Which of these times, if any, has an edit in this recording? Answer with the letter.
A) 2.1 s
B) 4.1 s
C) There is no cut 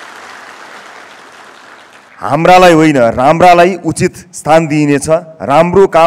A